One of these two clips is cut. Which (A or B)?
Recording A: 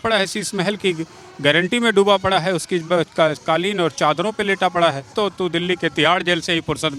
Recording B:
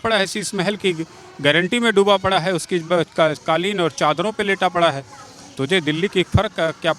A